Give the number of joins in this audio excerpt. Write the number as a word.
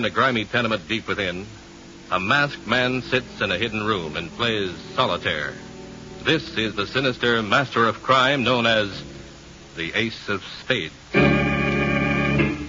zero